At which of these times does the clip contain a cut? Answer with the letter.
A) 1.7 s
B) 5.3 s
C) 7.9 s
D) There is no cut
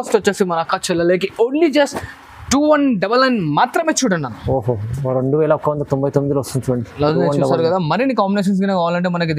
D